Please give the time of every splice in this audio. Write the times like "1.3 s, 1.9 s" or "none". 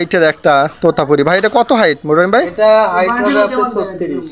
none

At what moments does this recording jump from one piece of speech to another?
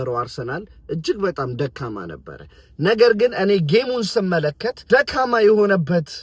none

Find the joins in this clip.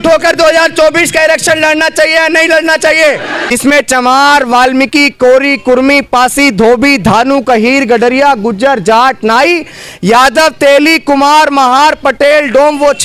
3.4 s

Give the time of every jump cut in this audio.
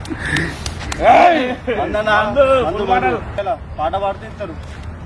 1.6 s, 3.3 s

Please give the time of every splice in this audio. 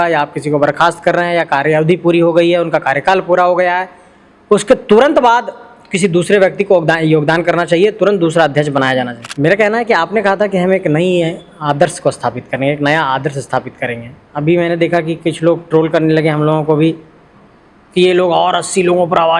9.2 s

